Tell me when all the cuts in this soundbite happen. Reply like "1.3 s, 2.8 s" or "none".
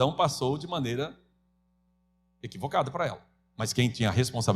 none